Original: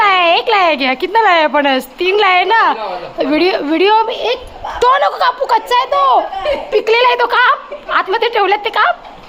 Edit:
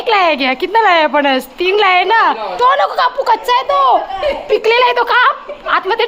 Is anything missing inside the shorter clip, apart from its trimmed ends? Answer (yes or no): yes